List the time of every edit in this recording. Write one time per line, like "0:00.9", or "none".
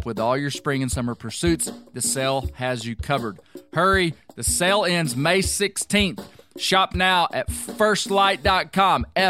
none